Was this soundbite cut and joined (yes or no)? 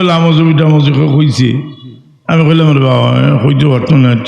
no